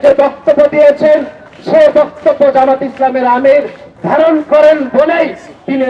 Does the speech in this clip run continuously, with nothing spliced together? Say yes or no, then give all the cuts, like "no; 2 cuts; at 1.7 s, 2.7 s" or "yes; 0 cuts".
yes; 0 cuts